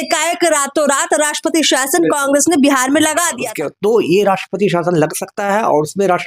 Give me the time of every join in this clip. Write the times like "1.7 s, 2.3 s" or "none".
3.5 s